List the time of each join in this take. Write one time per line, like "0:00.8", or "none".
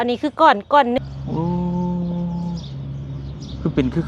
0:01.0